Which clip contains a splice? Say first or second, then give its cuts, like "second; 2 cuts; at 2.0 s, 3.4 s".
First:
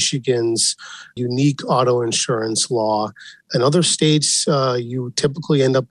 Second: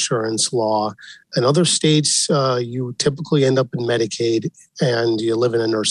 first; 1 cut; at 1.2 s